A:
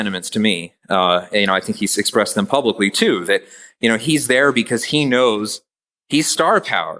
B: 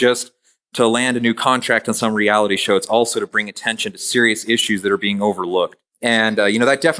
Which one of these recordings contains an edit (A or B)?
B